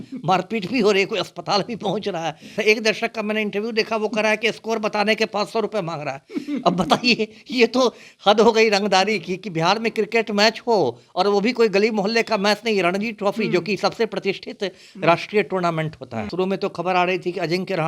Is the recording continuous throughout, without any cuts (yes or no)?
no